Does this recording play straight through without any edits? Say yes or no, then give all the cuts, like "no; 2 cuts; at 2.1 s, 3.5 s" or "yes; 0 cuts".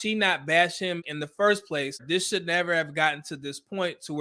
no; 2 cuts; at 1.1 s, 2.0 s